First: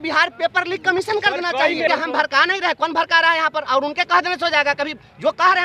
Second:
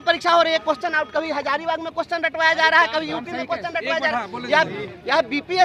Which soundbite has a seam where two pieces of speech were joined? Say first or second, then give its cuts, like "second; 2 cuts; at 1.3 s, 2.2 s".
first; 1 cut; at 1.9 s